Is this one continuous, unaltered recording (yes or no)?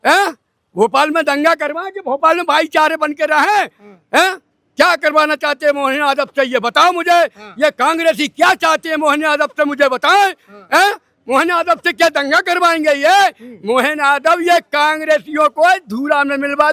yes